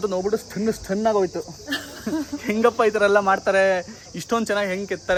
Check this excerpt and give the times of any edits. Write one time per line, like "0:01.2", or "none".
none